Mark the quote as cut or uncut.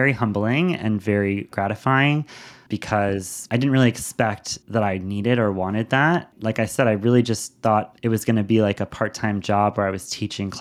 uncut